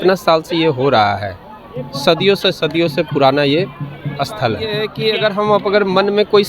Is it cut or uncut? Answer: uncut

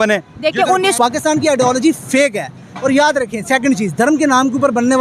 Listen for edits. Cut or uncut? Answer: cut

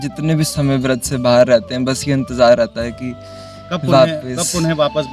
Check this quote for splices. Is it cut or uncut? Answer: uncut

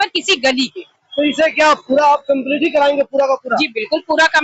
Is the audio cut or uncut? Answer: uncut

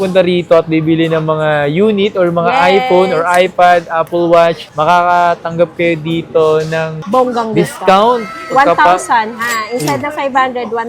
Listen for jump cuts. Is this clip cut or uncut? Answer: uncut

